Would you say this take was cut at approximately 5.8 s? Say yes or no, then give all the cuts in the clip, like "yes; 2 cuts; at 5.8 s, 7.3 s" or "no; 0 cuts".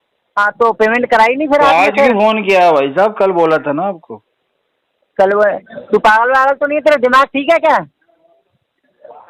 no; 0 cuts